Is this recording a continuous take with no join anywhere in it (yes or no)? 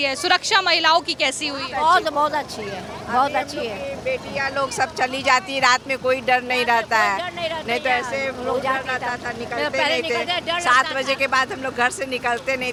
yes